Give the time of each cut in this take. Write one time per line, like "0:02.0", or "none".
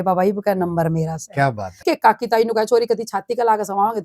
0:01.8